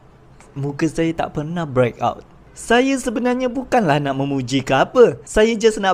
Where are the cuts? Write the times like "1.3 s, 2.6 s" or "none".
none